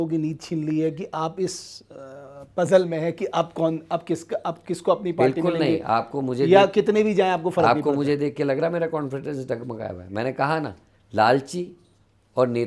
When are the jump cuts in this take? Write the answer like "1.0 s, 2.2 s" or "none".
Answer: none